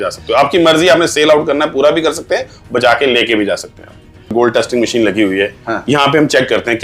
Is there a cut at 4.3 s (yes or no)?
yes